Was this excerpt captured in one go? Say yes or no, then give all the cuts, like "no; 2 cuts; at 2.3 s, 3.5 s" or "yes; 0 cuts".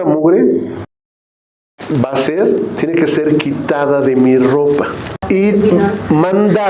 no; 1 cut; at 5.3 s